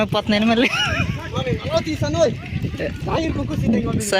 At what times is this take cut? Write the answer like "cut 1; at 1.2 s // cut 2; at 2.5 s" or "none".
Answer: cut 1; at 1.3 s